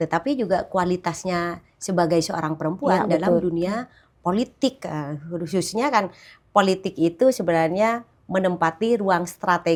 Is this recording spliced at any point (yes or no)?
no